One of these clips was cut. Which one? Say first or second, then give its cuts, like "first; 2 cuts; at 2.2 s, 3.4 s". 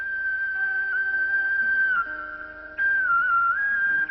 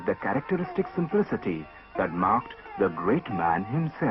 first; 1 cut; at 2.5 s